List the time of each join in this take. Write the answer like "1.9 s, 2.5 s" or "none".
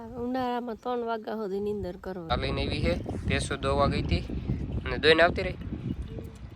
2.3 s